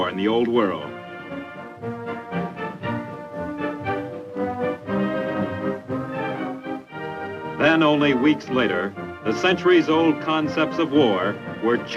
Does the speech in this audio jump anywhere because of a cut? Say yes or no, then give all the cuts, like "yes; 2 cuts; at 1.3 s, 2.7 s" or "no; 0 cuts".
no; 0 cuts